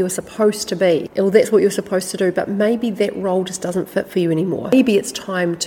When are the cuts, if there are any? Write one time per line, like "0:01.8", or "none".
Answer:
0:04.7